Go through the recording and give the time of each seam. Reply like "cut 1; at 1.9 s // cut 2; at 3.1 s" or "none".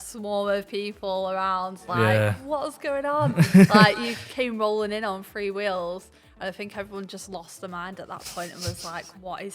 none